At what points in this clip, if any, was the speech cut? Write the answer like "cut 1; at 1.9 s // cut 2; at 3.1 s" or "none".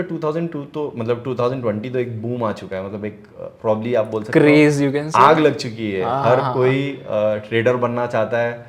none